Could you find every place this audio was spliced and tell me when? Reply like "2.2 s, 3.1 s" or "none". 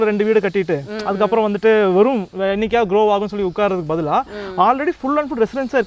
none